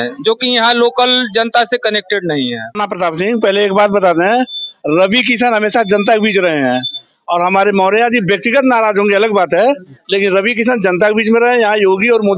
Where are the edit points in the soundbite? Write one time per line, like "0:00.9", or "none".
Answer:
0:02.8